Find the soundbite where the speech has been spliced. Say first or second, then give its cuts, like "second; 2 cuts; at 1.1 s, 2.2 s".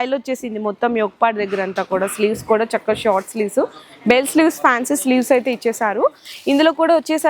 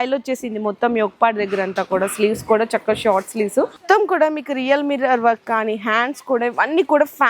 second; 1 cut; at 3.8 s